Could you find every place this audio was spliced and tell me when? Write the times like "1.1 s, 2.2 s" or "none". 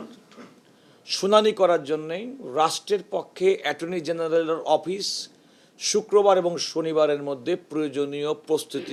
none